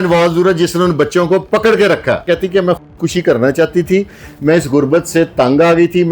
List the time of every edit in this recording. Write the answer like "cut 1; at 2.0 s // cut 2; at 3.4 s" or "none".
cut 1; at 2.3 s